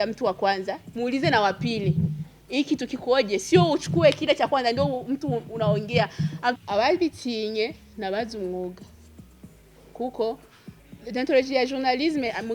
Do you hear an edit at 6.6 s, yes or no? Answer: yes